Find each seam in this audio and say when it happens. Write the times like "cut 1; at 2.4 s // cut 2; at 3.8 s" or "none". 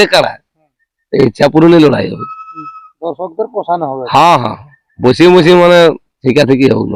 none